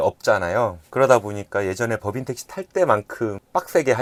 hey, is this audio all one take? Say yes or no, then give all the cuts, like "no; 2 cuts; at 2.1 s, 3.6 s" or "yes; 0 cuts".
yes; 0 cuts